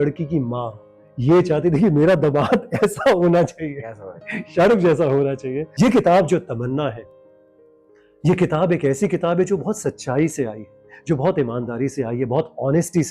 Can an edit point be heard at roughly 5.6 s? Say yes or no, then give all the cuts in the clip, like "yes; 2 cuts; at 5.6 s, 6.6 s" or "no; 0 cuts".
yes; 1 cut; at 5.6 s